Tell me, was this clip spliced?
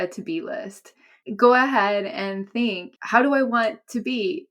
yes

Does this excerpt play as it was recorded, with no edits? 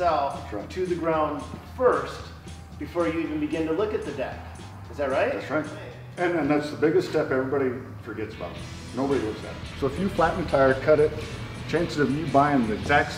no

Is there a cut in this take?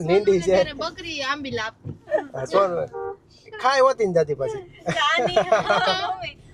no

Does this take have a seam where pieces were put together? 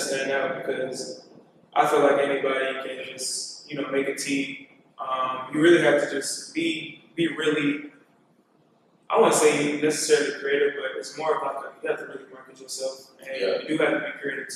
no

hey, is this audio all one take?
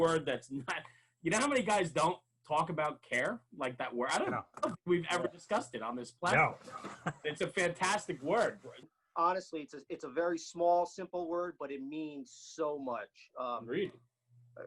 no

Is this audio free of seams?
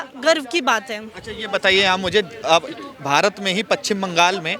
yes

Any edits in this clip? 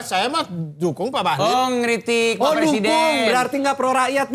no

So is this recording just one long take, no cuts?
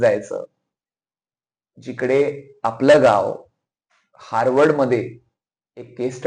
yes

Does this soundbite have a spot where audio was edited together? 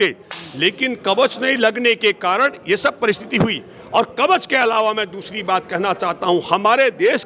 no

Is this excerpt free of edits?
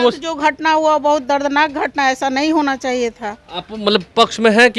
yes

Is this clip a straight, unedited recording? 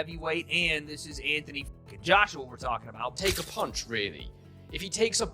no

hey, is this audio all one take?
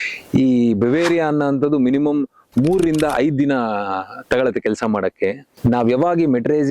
no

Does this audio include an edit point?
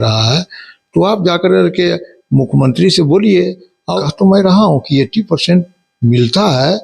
yes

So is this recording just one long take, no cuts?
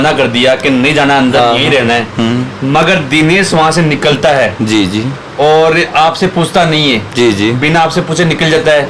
yes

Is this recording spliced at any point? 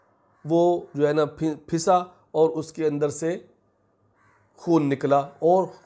no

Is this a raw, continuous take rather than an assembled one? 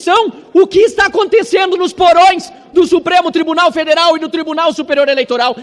yes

